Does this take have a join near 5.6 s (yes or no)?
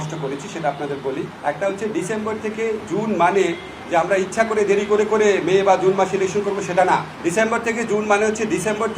no